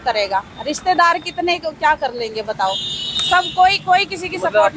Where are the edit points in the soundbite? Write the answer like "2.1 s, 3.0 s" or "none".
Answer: none